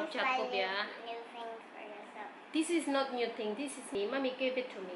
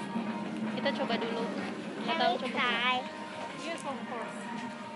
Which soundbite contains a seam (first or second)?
first